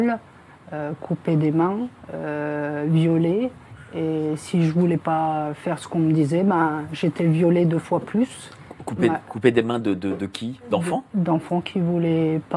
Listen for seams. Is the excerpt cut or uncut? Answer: uncut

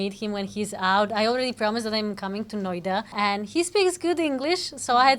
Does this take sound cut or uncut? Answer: cut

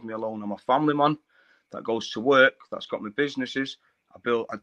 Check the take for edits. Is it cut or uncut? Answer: uncut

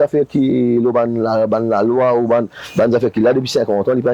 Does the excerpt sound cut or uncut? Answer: uncut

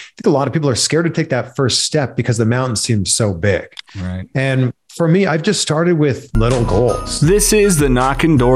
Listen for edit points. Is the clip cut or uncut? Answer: cut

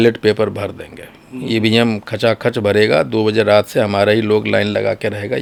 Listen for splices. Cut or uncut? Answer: uncut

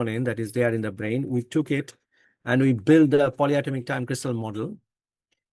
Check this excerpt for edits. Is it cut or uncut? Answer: uncut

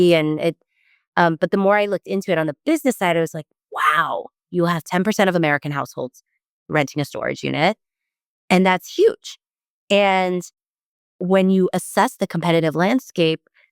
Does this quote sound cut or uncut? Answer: uncut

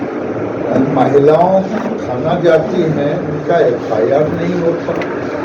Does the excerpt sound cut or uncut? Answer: uncut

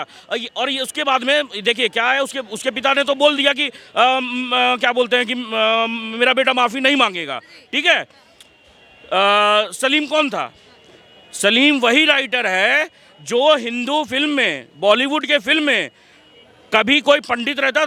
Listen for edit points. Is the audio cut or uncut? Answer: uncut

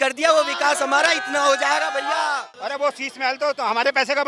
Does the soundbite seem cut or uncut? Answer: cut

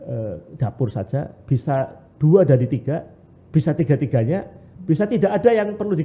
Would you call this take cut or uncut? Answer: uncut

